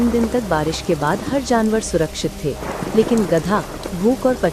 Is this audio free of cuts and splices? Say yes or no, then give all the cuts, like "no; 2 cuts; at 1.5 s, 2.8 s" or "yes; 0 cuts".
yes; 0 cuts